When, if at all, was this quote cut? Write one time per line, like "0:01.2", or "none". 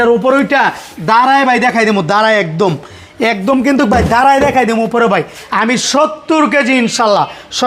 none

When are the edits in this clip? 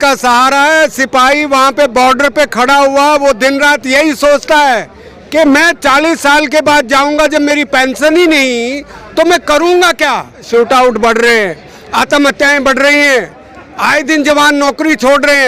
0:10.5

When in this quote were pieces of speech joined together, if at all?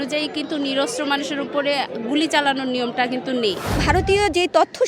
0:03.8

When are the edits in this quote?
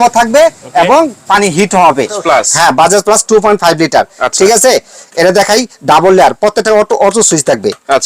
0:02.2

